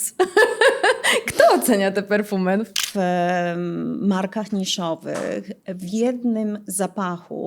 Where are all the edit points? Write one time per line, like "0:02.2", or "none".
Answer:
0:02.8